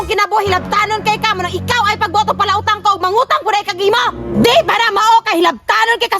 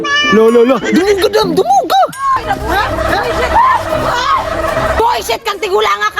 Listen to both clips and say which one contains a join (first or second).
second